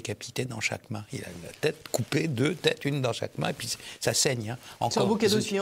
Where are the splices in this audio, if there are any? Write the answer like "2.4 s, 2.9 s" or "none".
none